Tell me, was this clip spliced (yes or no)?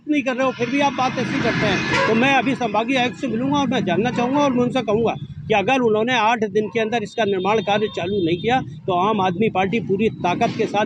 no